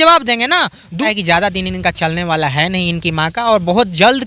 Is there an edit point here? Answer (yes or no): yes